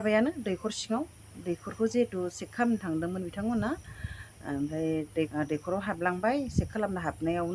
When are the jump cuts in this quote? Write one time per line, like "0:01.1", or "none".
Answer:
0:05.3